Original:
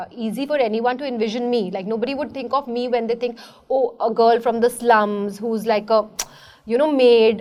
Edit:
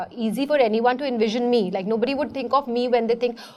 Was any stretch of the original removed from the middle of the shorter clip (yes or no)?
no